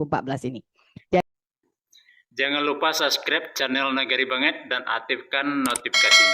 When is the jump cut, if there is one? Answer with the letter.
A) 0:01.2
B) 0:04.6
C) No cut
A